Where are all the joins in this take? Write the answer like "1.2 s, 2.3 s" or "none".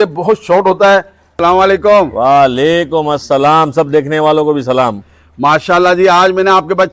1.4 s